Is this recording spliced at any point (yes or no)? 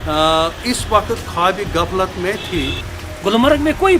yes